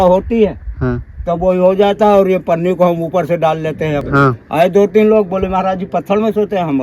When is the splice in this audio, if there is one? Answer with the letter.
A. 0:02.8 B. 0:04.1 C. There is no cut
B